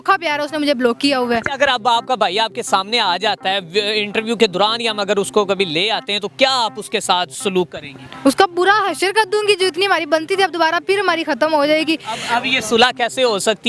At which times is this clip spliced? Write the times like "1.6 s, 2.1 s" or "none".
none